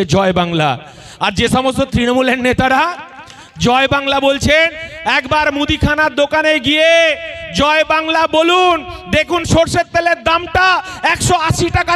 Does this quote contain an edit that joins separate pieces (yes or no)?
no